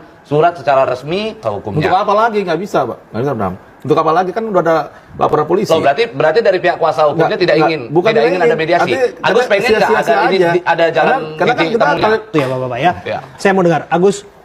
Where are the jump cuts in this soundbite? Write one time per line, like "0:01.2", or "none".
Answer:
0:01.6
0:12.3